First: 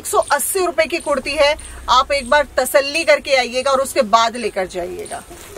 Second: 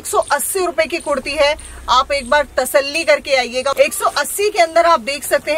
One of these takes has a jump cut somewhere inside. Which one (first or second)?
second